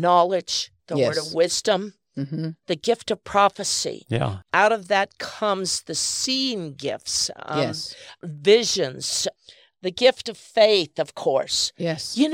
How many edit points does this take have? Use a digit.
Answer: 1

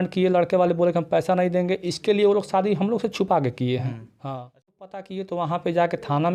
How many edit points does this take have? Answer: 1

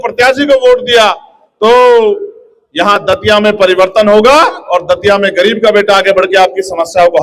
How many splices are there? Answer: 0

